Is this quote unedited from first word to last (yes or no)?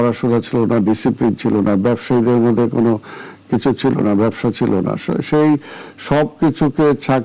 yes